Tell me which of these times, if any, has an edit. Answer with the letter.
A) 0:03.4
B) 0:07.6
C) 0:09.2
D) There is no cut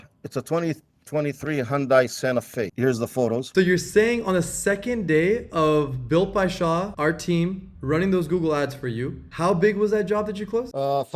A